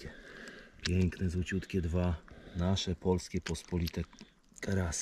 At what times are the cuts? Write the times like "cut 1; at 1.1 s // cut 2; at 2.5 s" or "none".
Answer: none